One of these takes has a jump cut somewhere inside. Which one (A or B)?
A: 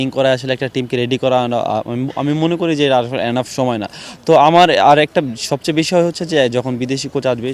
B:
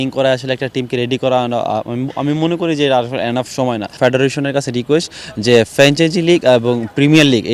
B